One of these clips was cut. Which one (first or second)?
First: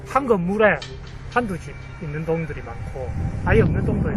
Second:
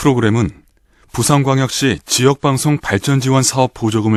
first